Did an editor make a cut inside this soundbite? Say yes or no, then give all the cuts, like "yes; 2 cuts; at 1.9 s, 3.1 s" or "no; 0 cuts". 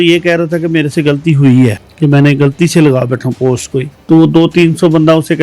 yes; 2 cuts; at 1.9 s, 3.9 s